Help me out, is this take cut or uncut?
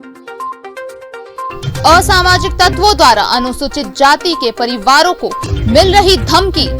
cut